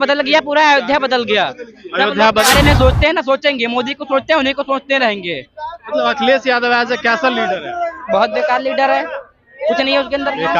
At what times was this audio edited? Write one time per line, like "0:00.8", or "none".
0:02.5